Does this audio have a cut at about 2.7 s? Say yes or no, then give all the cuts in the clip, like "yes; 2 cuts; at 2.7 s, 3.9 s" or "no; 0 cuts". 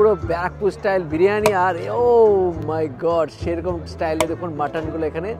no; 0 cuts